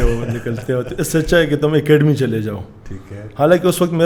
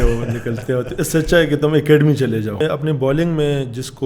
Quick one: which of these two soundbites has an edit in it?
second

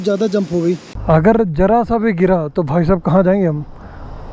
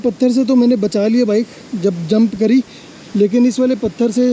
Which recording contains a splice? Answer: first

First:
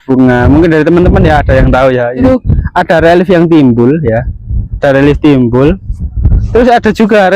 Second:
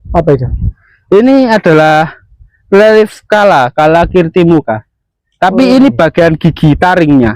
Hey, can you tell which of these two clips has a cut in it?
first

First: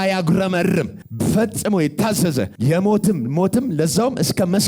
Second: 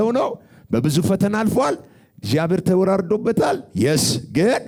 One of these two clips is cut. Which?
first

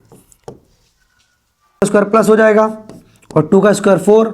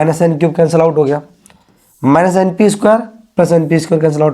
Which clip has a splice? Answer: first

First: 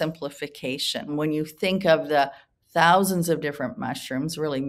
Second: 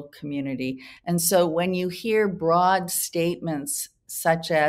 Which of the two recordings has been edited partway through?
first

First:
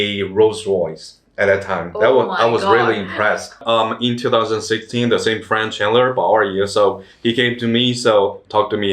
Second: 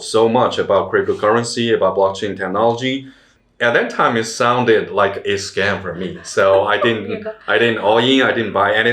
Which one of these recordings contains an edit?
first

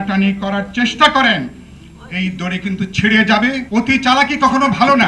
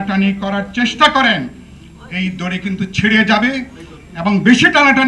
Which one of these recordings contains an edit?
first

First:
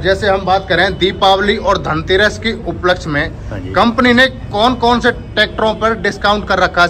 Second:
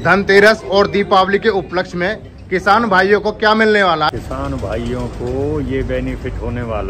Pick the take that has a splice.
second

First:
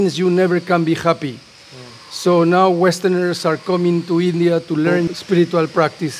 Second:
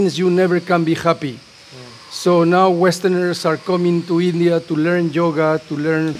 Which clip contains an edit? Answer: first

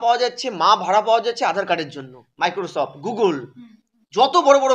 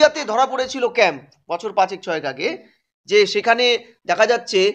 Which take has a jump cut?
first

